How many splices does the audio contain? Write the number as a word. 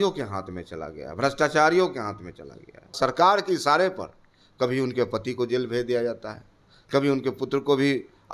one